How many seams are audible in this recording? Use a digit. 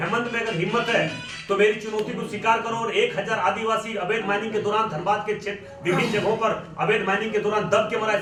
0